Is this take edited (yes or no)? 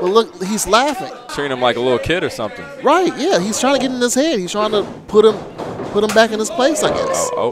yes